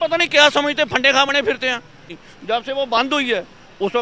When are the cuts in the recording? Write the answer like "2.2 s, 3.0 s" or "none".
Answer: 2.1 s